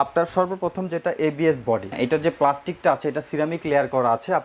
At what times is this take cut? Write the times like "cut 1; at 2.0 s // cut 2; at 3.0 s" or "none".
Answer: cut 1; at 1.9 s